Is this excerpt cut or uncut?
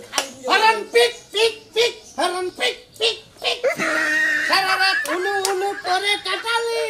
uncut